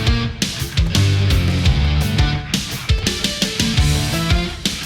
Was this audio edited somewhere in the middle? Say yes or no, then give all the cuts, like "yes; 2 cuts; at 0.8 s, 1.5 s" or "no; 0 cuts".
no; 0 cuts